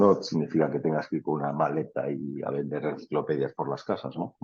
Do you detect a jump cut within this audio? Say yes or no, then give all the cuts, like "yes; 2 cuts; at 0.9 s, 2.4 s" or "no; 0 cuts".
no; 0 cuts